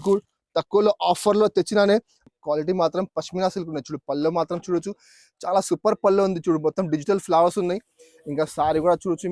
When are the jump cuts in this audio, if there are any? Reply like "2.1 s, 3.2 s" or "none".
2.2 s

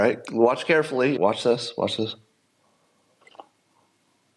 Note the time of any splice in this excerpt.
1.2 s

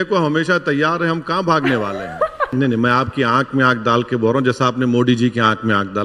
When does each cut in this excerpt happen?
2.5 s

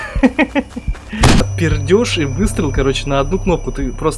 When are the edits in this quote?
1.4 s

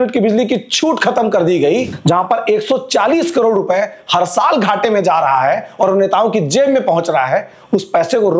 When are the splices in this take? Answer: 1.9 s

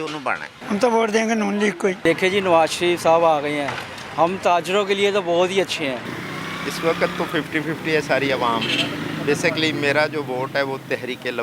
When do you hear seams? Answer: 2.0 s, 6.1 s

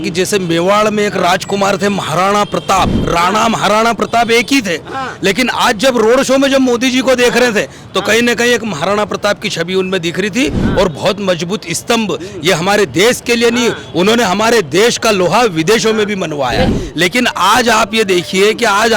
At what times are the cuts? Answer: 16.8 s

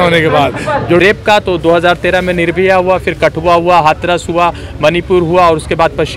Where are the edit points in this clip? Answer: 1.0 s

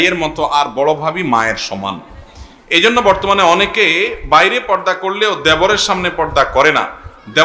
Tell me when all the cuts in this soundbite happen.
none

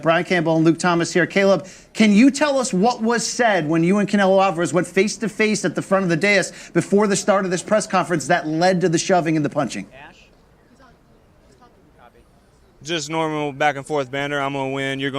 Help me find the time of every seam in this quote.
6.6 s

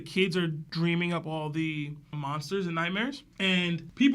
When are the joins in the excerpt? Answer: none

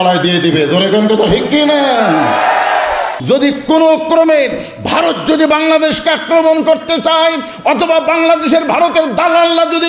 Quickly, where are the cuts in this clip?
3.1 s

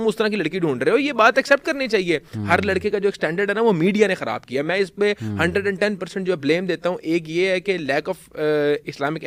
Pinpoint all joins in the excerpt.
none

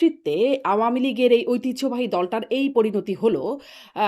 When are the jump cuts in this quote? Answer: none

